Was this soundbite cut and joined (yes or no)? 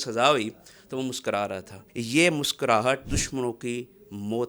yes